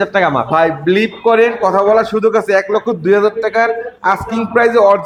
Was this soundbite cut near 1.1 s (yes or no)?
no